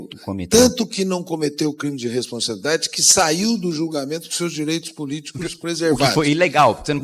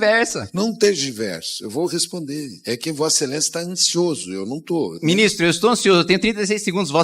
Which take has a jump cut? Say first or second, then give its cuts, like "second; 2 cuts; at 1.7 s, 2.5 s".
second; 1 cut; at 4.9 s